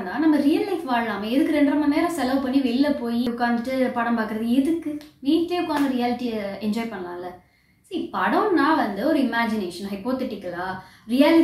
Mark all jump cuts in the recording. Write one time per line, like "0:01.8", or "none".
none